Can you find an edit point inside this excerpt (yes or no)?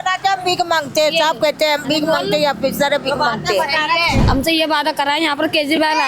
yes